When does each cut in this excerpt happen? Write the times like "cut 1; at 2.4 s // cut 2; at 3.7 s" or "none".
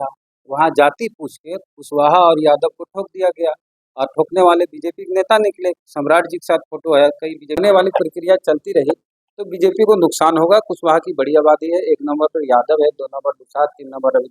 cut 1; at 7.6 s